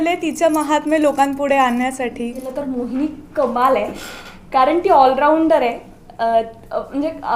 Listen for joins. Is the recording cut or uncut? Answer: cut